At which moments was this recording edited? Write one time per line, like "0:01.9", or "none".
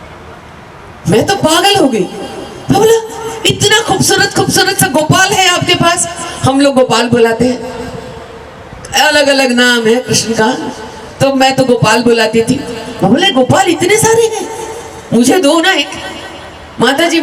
none